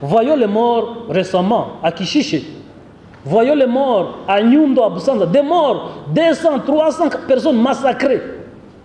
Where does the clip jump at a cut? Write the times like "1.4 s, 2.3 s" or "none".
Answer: none